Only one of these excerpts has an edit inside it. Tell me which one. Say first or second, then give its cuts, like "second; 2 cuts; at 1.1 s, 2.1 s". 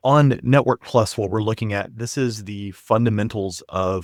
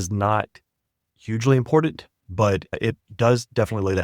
second; 1 cut; at 2.8 s